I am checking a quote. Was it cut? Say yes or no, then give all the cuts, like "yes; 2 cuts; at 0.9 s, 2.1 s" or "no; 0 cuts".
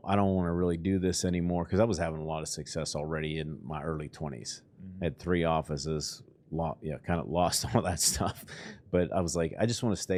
no; 0 cuts